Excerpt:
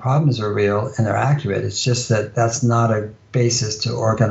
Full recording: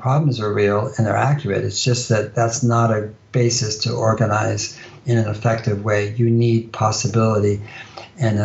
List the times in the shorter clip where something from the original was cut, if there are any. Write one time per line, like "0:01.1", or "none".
none